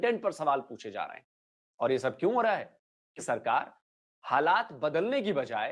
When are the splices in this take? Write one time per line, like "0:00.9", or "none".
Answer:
0:03.2